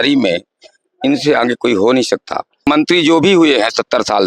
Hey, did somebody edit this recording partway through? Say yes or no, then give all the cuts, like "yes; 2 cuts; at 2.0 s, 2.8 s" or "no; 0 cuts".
yes; 1 cut; at 2.7 s